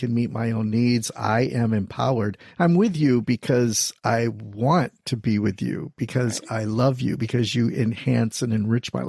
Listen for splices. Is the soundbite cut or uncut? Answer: uncut